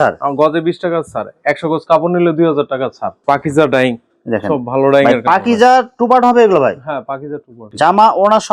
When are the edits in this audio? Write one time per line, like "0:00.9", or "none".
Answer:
0:03.1
0:07.6